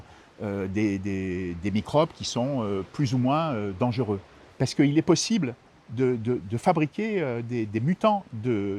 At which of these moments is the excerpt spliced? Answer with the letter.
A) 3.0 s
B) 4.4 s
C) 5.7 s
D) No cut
B